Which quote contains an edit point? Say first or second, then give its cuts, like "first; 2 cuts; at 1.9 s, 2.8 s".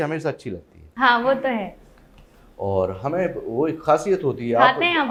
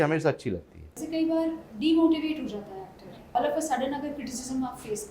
second; 2 cuts; at 0.9 s, 3.3 s